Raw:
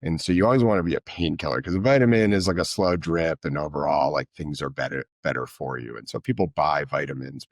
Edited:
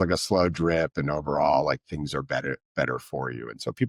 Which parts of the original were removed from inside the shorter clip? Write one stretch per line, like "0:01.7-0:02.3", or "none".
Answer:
none